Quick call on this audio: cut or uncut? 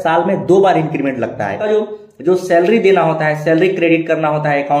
cut